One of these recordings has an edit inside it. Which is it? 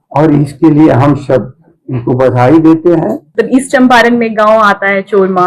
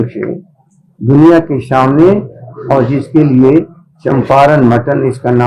first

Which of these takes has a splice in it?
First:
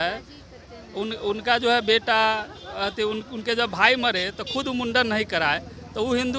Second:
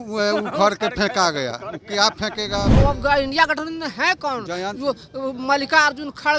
second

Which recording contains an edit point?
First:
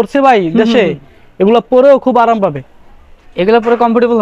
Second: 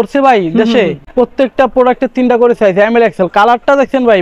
second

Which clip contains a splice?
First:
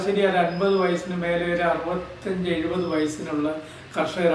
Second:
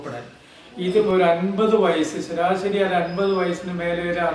second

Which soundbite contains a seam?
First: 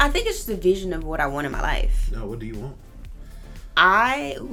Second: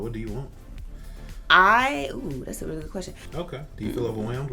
second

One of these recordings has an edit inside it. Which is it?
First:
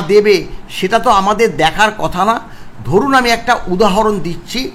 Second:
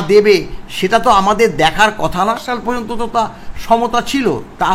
second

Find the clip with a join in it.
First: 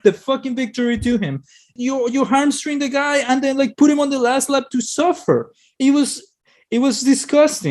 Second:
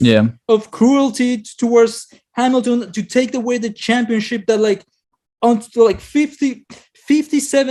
first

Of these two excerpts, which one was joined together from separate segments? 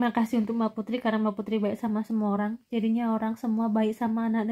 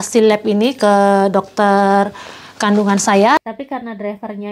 second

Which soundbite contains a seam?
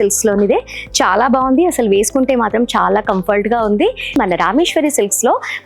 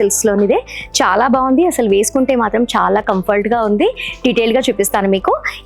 first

